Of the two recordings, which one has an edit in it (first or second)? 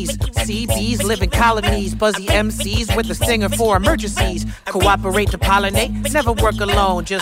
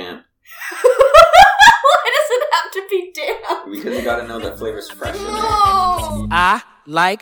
second